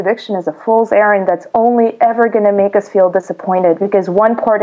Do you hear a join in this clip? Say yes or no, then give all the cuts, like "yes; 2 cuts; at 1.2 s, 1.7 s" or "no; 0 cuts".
no; 0 cuts